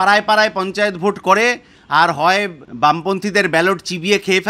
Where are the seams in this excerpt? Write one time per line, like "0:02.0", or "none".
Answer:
0:02.6